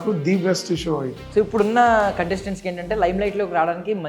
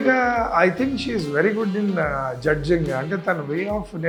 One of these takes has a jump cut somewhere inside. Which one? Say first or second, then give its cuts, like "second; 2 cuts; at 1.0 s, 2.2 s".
first; 1 cut; at 1.2 s